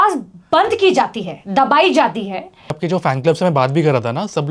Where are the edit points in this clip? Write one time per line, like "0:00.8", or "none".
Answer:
0:02.8